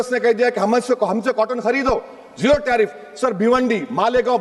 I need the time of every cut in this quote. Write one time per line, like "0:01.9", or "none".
none